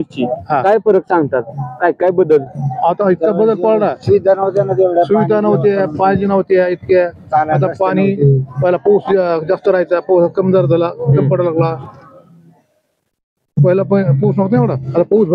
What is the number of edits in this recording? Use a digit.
0